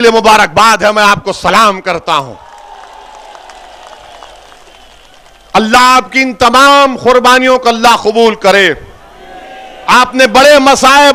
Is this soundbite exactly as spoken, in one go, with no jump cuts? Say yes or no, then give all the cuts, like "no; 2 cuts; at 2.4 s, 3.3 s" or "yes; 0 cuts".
yes; 0 cuts